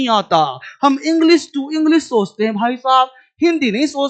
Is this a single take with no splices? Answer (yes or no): yes